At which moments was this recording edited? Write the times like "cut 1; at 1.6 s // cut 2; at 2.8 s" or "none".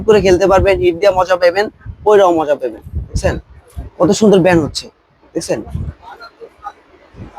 none